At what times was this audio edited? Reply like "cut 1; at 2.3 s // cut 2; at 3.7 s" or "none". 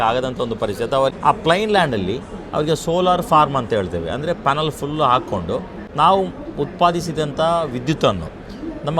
cut 1; at 1.1 s // cut 2; at 5.8 s